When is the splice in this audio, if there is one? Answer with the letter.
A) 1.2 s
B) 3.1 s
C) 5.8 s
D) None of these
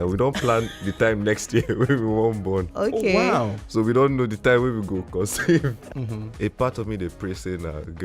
C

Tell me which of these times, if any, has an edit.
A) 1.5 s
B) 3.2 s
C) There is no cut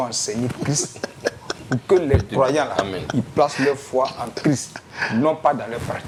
C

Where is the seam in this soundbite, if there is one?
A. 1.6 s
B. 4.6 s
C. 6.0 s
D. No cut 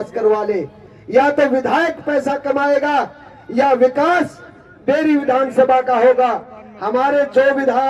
D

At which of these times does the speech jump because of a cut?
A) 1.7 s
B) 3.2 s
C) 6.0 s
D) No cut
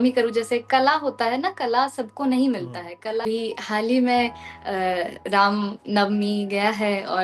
B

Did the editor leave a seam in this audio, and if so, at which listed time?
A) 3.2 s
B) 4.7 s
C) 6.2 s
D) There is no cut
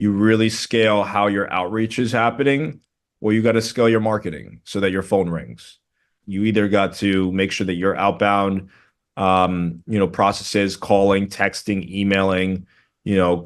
C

